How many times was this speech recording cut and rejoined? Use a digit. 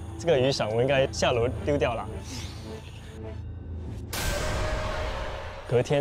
1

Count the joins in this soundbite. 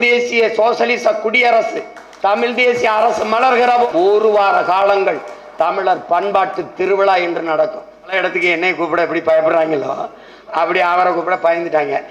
2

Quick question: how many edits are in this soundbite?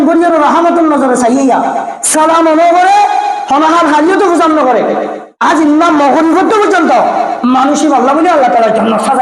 1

